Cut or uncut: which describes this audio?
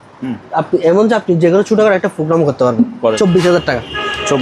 cut